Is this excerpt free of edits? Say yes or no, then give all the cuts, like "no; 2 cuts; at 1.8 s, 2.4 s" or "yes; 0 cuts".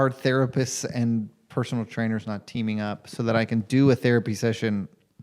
yes; 0 cuts